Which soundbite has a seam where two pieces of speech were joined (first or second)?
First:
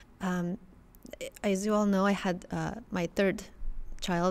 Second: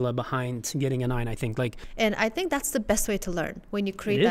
second